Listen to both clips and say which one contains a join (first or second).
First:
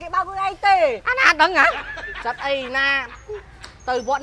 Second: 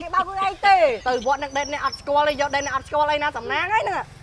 second